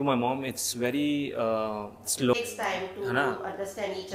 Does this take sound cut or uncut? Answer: cut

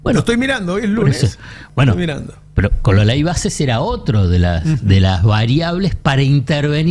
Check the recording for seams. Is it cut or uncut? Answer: uncut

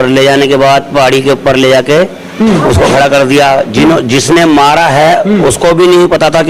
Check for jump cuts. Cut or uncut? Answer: uncut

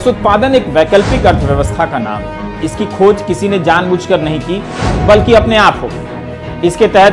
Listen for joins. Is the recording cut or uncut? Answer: uncut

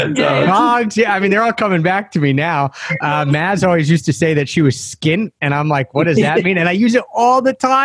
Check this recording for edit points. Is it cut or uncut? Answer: uncut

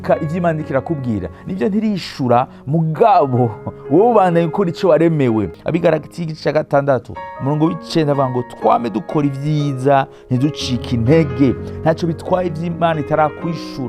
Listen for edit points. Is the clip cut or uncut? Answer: cut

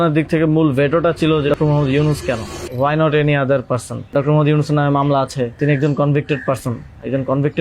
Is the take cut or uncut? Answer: cut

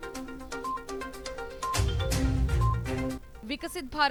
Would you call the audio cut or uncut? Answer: uncut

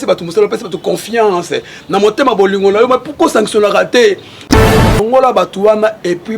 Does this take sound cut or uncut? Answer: cut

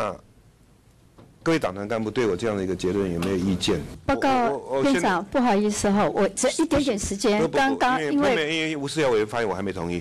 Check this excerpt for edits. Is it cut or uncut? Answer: cut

